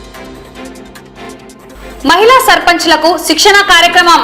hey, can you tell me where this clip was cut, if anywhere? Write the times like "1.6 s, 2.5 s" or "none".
1.5 s